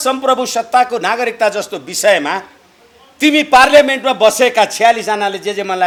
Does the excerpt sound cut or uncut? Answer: uncut